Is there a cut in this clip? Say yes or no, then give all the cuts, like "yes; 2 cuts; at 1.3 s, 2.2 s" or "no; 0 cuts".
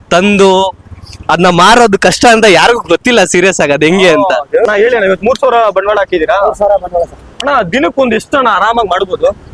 no; 0 cuts